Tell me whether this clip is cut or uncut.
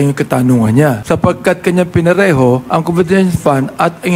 cut